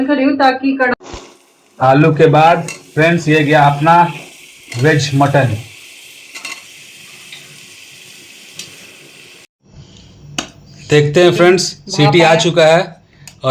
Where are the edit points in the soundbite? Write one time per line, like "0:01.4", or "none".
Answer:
0:00.9
0:09.5